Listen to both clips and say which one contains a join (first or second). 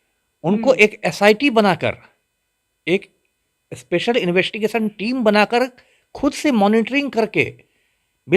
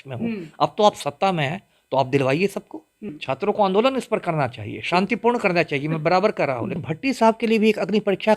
second